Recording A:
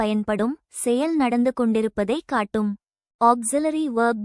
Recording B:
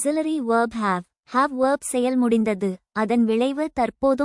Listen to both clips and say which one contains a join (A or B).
A